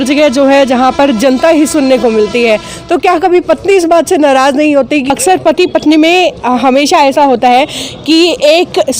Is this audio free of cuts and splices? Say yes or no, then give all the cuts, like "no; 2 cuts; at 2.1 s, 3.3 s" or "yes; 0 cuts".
no; 1 cut; at 5.1 s